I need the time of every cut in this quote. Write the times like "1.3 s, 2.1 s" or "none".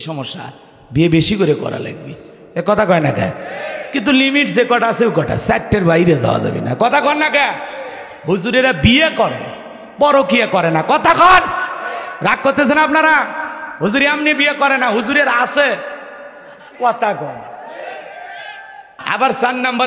18.9 s